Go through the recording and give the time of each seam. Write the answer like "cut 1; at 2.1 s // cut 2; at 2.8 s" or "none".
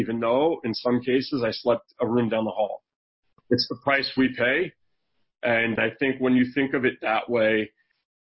cut 1; at 1.9 s // cut 2; at 3.4 s // cut 3; at 5.8 s